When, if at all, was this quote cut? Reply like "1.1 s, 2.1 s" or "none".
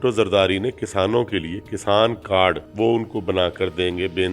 2.7 s